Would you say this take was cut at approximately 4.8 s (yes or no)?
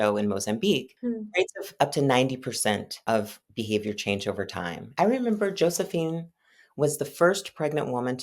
yes